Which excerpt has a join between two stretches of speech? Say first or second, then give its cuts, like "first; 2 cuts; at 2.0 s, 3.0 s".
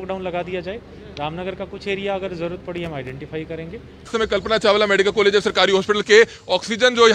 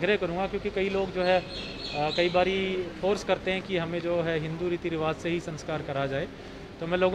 first; 1 cut; at 4.1 s